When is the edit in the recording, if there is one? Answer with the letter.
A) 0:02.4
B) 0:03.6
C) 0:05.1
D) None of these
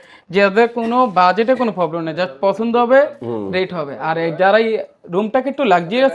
D